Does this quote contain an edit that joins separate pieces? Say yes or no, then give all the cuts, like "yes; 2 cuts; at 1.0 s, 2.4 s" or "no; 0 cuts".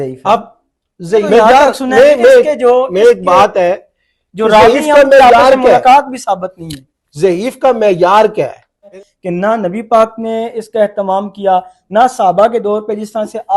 yes; 2 cuts; at 1.3 s, 9.0 s